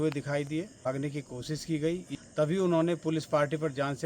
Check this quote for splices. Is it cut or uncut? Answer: cut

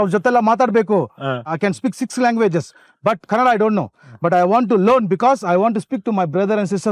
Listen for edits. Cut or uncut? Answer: cut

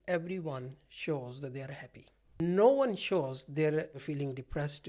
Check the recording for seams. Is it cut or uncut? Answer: cut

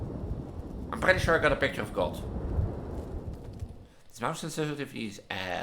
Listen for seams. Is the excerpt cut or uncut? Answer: cut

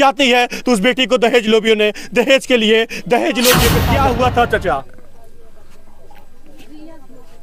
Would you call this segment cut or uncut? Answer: cut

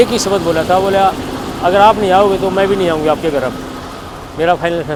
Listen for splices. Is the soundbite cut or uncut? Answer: uncut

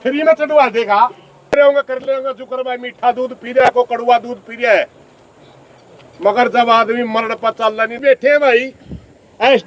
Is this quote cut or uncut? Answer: cut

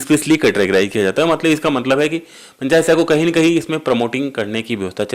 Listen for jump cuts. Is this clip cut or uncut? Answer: uncut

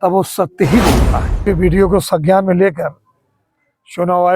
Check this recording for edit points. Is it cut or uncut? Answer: cut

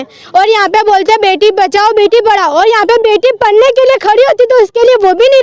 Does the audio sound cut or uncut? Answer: uncut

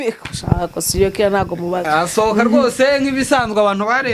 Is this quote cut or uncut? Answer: uncut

